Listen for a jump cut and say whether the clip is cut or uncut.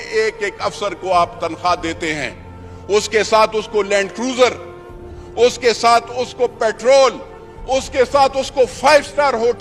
uncut